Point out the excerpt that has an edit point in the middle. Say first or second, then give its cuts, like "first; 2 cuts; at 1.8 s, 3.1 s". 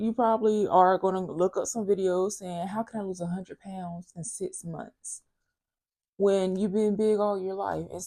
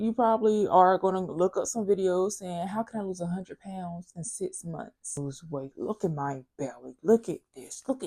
second; 1 cut; at 5.2 s